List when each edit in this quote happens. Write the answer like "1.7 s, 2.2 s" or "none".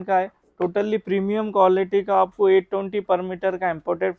none

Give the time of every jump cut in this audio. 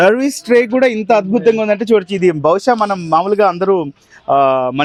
none

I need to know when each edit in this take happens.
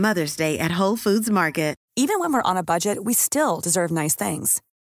1.8 s

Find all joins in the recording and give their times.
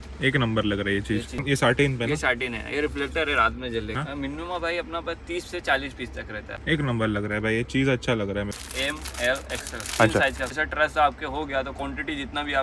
1.4 s, 4.0 s, 6.4 s, 8.5 s, 10.6 s

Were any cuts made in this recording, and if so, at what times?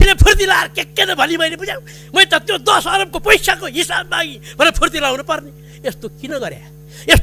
none

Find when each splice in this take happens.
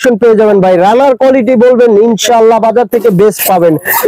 none

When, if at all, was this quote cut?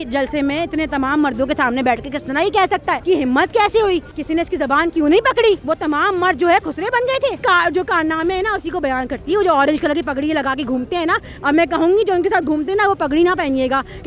3.0 s, 4.1 s, 5.6 s, 7.4 s

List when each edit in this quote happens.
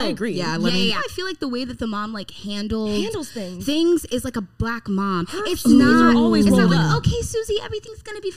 1.0 s

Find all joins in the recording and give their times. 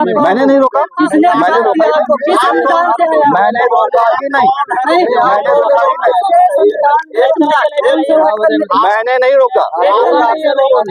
none

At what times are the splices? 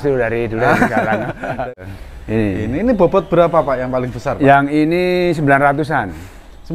1.7 s

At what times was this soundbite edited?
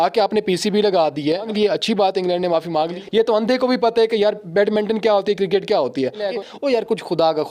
1.5 s, 3.0 s, 6.2 s

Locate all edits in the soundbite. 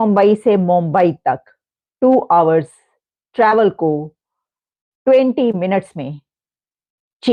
none

